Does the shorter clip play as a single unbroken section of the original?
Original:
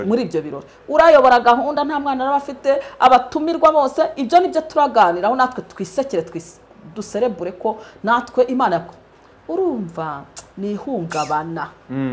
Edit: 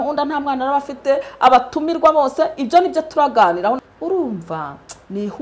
no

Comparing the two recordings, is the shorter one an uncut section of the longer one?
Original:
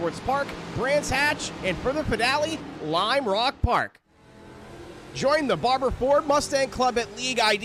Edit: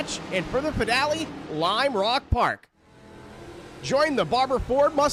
yes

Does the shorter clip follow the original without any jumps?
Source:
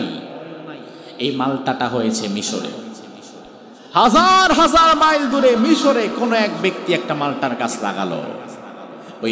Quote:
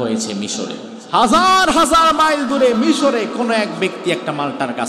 no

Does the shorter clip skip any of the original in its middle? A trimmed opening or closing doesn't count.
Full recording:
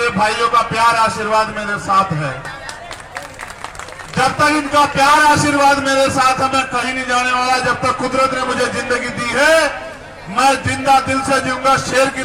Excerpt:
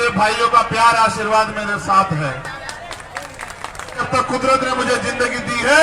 yes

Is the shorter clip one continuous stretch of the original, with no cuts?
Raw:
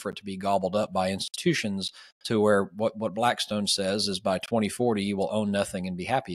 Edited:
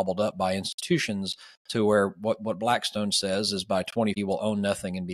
no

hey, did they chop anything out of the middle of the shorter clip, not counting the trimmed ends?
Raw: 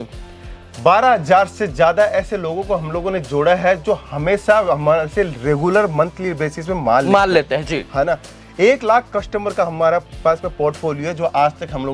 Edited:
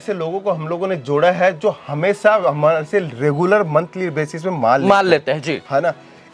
no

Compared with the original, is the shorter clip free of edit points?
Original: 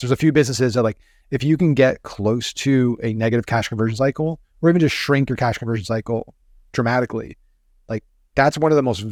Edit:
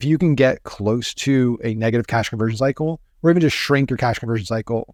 yes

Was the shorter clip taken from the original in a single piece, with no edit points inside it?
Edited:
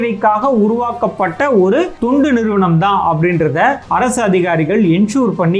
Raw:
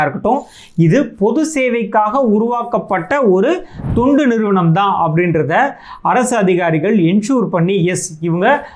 no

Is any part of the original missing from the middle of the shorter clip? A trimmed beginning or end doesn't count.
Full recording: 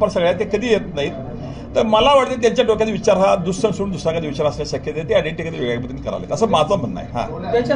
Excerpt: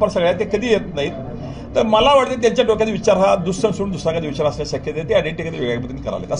no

